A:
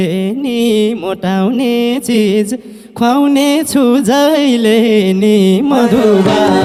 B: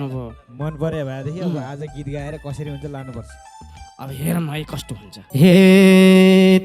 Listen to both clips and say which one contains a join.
B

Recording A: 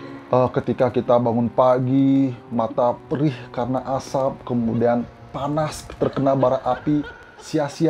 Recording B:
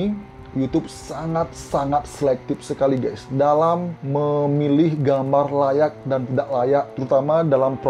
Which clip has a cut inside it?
B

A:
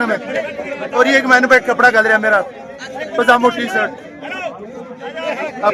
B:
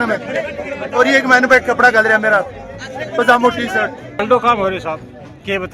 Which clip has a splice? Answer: B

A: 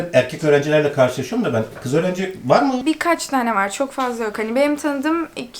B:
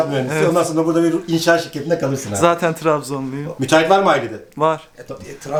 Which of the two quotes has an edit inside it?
A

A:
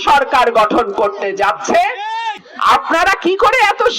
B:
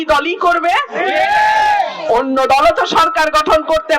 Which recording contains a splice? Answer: A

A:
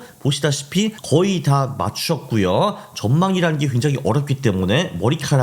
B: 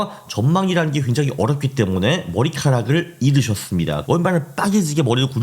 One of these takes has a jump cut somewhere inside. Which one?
B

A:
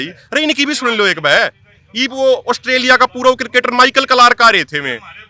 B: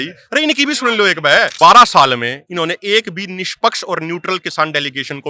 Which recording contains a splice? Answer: B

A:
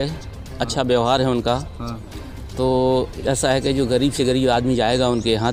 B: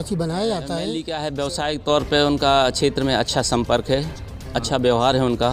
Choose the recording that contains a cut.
B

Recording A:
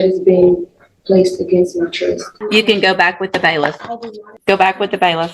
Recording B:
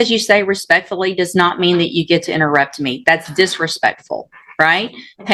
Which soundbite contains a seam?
A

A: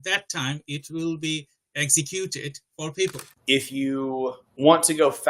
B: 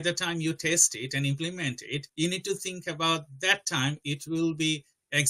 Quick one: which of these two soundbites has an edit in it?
A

